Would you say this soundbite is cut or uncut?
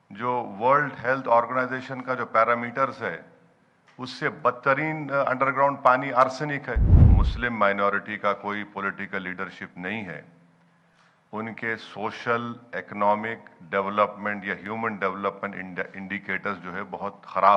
cut